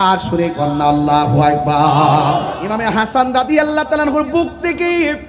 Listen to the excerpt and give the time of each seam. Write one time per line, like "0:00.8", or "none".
0:03.1